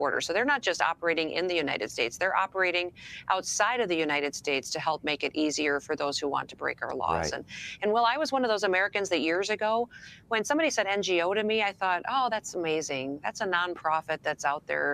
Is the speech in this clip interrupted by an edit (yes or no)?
yes